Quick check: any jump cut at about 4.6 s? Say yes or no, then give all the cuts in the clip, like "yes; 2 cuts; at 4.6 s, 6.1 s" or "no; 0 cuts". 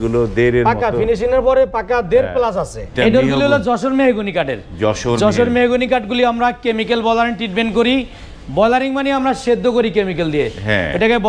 no; 1 cut; at 2.9 s